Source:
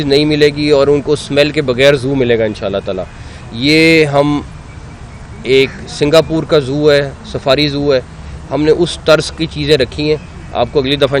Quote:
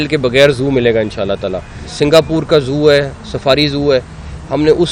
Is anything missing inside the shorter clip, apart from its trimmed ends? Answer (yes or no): yes